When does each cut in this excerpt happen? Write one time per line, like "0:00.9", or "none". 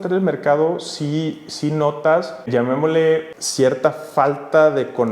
0:02.4
0:03.3